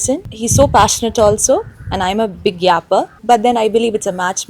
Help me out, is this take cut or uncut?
cut